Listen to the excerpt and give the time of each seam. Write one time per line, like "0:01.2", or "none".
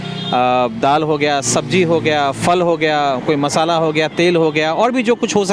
none